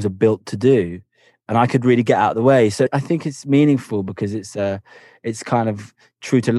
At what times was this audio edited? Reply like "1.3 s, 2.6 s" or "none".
2.9 s